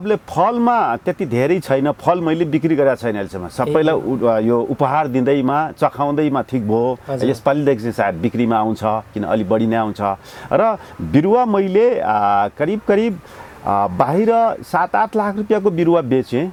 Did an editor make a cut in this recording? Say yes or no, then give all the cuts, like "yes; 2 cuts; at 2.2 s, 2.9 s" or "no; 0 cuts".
no; 0 cuts